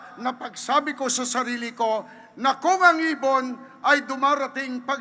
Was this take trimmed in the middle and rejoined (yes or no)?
no